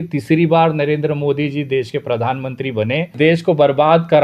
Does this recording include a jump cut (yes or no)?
yes